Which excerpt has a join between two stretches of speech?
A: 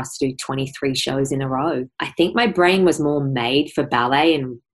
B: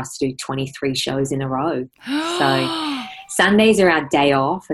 A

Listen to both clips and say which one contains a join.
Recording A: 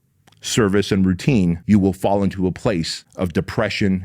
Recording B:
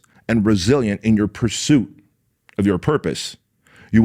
A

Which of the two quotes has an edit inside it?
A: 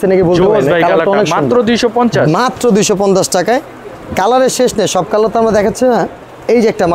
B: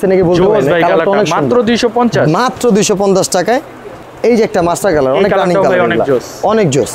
B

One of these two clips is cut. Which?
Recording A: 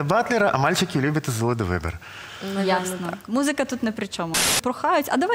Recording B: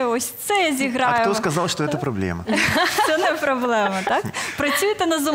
A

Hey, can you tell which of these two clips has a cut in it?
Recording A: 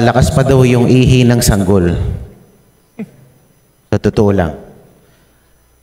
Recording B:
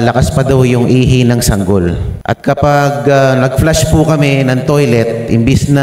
B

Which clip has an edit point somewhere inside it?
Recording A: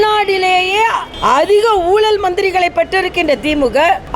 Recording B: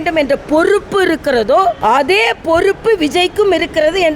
B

